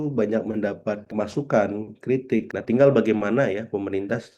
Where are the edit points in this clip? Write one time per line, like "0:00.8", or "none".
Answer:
0:01.1
0:02.5